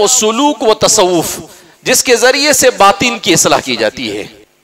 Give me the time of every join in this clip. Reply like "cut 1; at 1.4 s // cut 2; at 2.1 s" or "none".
none

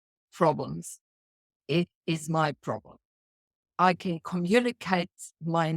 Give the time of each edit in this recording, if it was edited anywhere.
cut 1; at 3.7 s

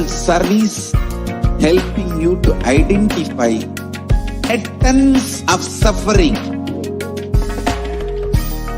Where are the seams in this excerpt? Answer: cut 1; at 4.5 s // cut 2; at 6.4 s

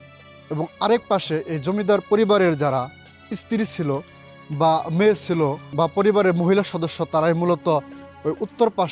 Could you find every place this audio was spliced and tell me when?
cut 1; at 5.6 s

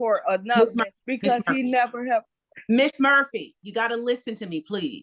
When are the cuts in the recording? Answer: cut 1; at 1.0 s // cut 2; at 3.6 s

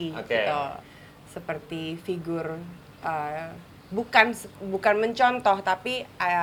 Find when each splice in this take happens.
none

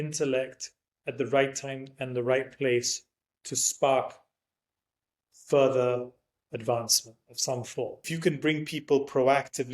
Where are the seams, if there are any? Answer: cut 1; at 8.0 s

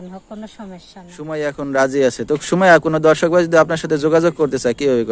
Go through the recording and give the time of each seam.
cut 1; at 1.3 s

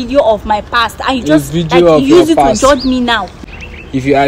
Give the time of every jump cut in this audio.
cut 1; at 3.3 s

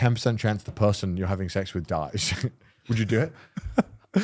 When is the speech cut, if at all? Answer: none

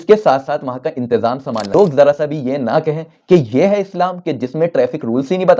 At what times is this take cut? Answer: cut 1; at 1.7 s

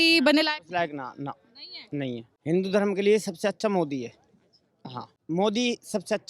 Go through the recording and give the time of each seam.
cut 1; at 2.3 s // cut 2; at 5.2 s

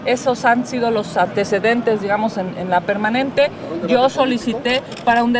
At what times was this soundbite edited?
none

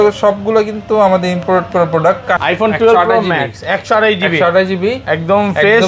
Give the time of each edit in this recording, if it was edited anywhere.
cut 1; at 2.4 s

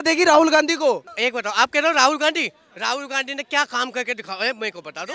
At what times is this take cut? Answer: cut 1; at 1.1 s

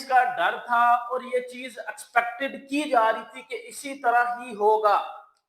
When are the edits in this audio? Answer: none

